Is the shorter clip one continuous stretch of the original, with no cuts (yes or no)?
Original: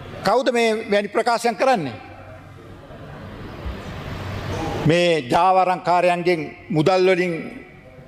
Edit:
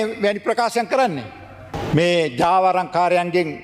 no